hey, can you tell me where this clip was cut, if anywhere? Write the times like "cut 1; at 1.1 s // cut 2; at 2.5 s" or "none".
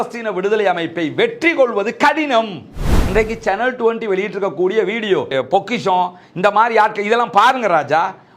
cut 1; at 2.9 s